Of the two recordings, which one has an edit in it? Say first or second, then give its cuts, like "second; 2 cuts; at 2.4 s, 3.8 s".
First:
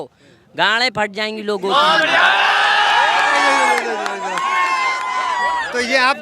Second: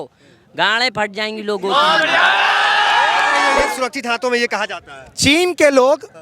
second; 1 cut; at 3.7 s